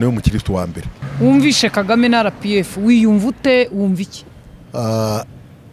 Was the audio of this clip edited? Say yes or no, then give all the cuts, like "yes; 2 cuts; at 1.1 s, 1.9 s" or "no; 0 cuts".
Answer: yes; 1 cut; at 1.0 s